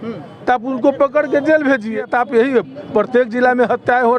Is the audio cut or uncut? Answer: cut